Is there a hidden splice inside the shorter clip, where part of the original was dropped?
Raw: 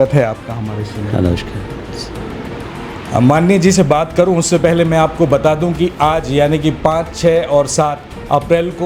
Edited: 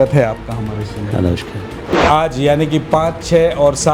yes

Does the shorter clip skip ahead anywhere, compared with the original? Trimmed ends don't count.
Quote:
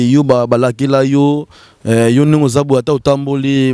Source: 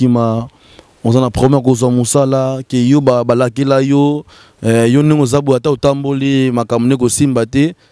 no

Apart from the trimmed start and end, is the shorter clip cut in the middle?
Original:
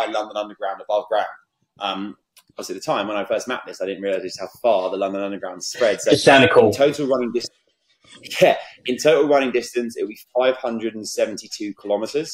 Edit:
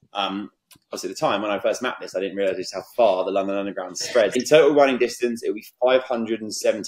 yes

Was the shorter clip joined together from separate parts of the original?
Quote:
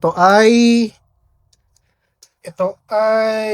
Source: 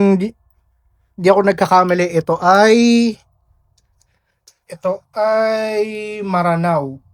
no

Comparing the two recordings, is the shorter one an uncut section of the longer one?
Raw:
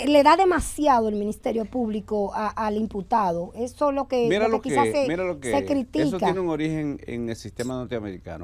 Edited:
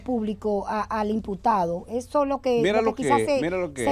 yes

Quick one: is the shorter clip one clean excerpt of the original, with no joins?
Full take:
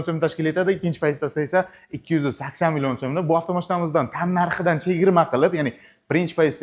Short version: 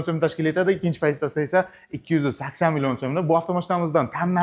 yes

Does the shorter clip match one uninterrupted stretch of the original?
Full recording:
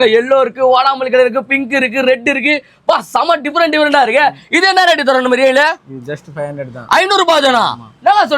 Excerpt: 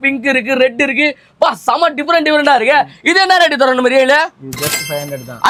yes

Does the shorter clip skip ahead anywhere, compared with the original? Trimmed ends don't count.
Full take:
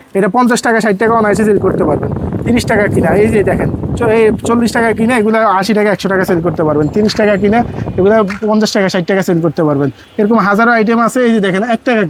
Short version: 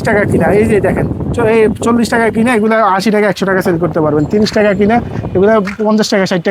no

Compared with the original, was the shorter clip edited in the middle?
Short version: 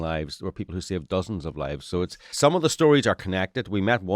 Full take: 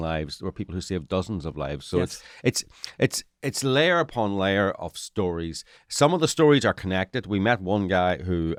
yes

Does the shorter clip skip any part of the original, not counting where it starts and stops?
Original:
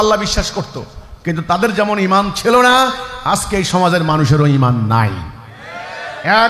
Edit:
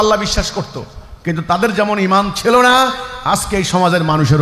no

